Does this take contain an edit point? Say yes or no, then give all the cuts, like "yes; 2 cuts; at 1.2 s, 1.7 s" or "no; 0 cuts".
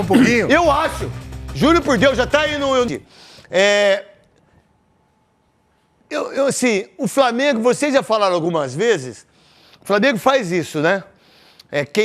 yes; 1 cut; at 2.9 s